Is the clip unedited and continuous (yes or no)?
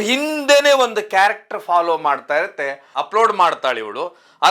no